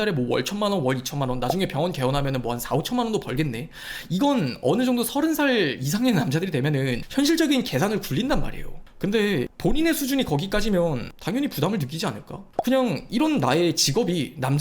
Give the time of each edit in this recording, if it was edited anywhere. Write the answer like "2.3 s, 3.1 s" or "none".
12.5 s

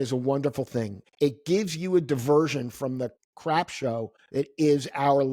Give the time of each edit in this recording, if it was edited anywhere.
1.0 s, 3.2 s, 4.2 s

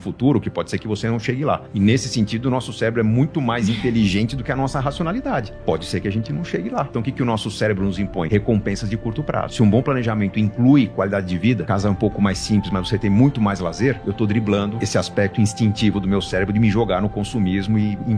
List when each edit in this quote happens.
1.7 s, 6.9 s, 8.3 s, 9.5 s, 11.6 s, 14.0 s, 14.8 s

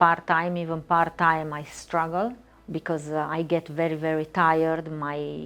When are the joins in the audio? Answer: 2.5 s

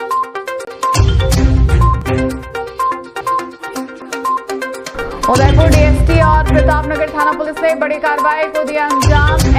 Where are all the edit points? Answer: 2.4 s

